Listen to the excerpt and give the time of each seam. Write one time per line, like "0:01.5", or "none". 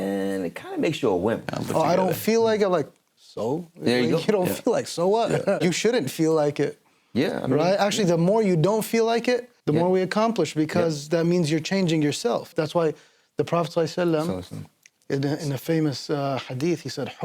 0:01.5
0:05.6
0:09.5
0:12.5